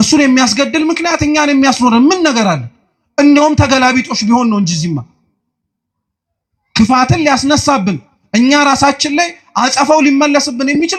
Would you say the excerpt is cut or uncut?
uncut